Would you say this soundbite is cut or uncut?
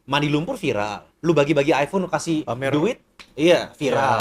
uncut